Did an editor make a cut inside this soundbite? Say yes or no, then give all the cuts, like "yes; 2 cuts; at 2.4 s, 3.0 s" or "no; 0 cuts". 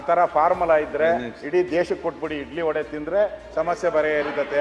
no; 0 cuts